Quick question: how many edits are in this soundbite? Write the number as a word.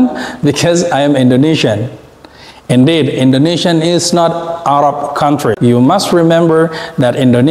one